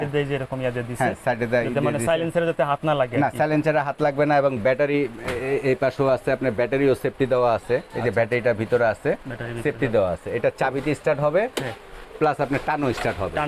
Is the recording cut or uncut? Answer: uncut